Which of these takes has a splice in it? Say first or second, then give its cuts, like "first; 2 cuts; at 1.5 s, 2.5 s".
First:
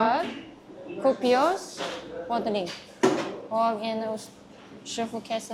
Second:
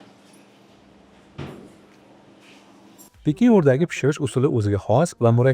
second; 1 cut; at 3.1 s